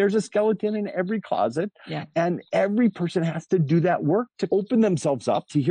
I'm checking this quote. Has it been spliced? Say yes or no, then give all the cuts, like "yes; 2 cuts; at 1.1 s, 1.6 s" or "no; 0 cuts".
no; 0 cuts